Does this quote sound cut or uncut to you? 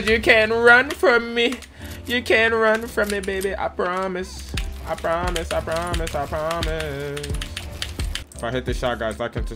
cut